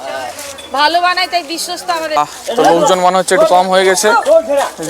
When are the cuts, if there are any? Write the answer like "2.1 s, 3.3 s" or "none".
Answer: 2.2 s